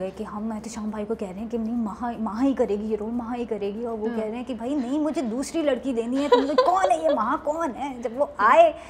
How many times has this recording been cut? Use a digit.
0